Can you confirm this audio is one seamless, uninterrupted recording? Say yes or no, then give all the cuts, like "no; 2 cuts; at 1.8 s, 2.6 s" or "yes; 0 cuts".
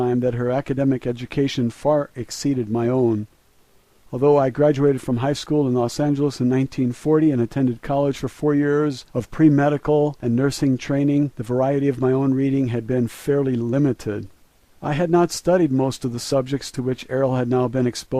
no; 1 cut; at 2.5 s